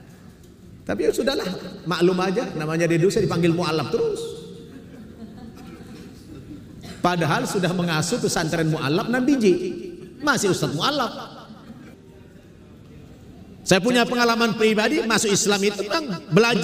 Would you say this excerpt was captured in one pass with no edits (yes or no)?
no